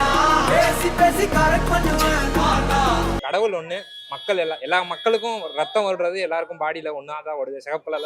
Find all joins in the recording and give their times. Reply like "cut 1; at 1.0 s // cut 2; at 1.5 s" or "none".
cut 1; at 3.2 s